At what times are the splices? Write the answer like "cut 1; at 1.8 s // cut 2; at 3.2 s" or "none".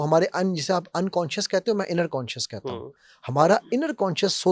none